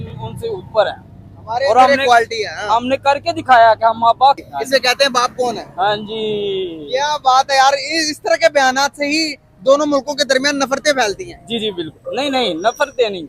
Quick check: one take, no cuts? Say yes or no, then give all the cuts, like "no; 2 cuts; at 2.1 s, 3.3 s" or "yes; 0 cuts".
no; 1 cut; at 4.4 s